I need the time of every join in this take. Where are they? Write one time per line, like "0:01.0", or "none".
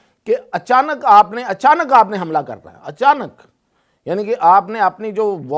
none